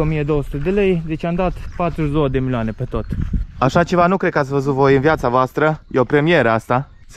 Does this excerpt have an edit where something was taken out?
yes; 1 cut; at 3.4 s

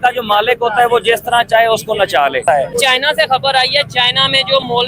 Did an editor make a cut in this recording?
yes; 1 cut; at 2.7 s

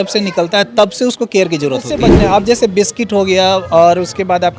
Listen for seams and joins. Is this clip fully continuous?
no; 1 cut; at 2.1 s

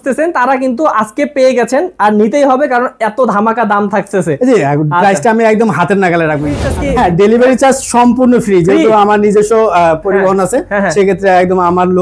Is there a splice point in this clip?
yes; 1 cut; at 6.7 s

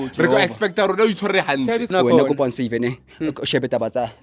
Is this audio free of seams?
no; 1 cut; at 1.9 s

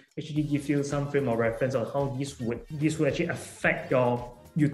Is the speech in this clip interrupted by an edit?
yes; 2 cuts; at 2.7 s, 3.8 s

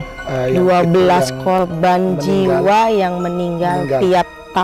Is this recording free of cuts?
yes; 0 cuts

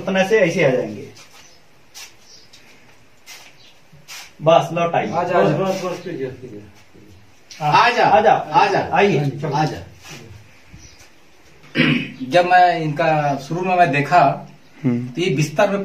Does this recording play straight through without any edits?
no; 1 cut; at 11.6 s

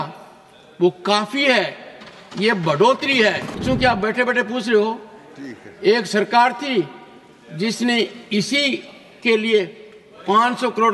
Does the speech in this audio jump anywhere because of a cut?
yes; 1 cut; at 3.6 s

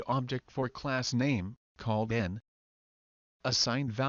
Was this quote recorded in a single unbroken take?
yes; 0 cuts

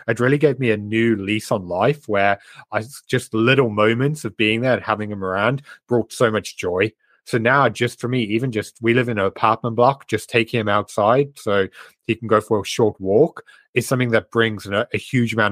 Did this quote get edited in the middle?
no; 0 cuts

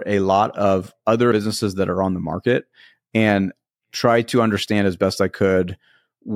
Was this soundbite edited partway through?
yes; 1 cut; at 1.3 s

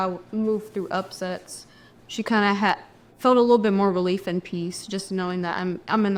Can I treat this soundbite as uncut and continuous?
yes; 0 cuts

